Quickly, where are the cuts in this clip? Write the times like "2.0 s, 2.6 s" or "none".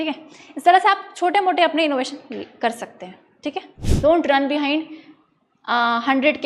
3.8 s